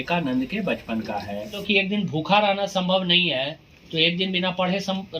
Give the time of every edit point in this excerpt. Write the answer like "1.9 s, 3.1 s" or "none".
1.6 s